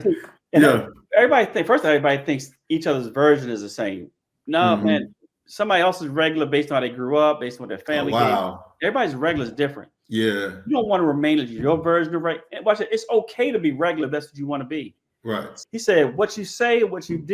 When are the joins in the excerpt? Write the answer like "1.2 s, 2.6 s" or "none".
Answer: 15.6 s